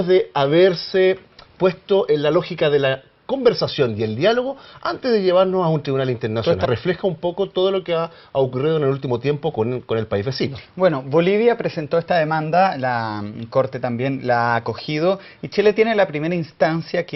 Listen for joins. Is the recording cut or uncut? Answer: uncut